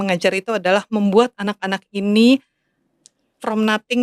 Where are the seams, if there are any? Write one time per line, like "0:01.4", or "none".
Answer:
none